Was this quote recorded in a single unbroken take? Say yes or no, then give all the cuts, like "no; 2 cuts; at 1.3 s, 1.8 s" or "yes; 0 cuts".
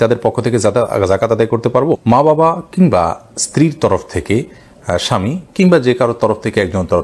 yes; 0 cuts